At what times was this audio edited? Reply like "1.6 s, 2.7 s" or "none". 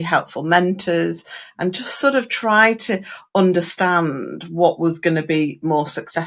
none